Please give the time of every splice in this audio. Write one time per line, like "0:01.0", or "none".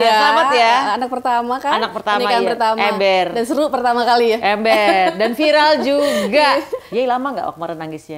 0:06.8

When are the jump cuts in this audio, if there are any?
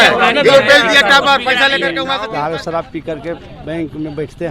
0:02.1

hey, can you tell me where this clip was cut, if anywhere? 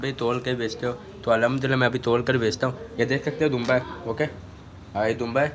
none

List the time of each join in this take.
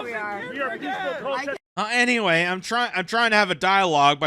0:01.7

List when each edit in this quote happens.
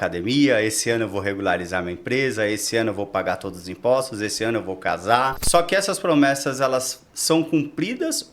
0:05.4

